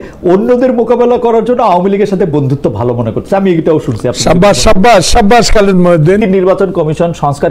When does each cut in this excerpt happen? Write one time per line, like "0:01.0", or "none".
0:06.2